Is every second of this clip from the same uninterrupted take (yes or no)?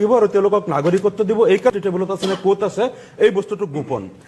no